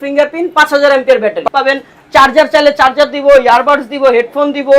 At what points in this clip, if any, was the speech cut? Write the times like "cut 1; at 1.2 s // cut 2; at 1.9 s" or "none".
cut 1; at 1.4 s

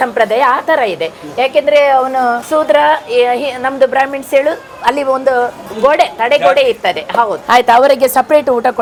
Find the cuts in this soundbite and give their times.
none

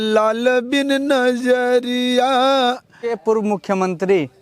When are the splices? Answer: cut 1; at 3.1 s

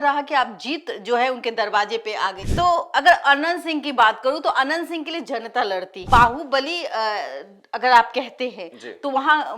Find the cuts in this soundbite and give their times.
cut 1; at 2.4 s // cut 2; at 6.1 s

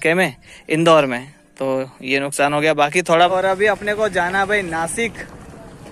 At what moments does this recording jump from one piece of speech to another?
cut 1; at 3.3 s

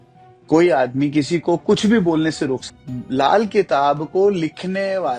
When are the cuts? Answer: cut 1; at 2.8 s

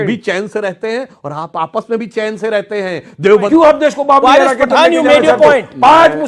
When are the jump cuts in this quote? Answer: cut 1; at 3.5 s

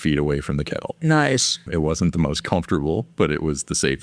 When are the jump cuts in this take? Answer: cut 1; at 1.6 s

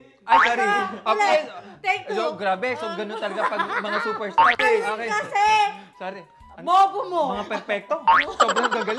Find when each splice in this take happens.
cut 1; at 4.6 s

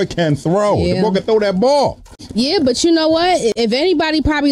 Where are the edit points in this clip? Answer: none

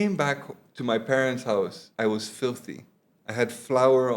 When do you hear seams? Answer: cut 1; at 1.8 s

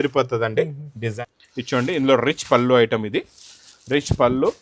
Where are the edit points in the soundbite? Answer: cut 1; at 1.1 s

